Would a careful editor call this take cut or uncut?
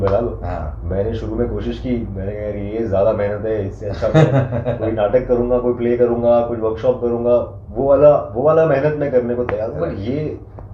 uncut